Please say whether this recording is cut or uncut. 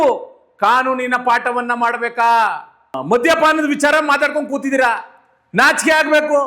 cut